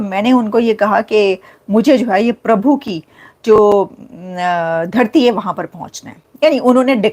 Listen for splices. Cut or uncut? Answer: uncut